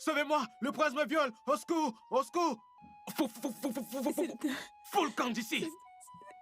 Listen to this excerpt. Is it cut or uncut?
cut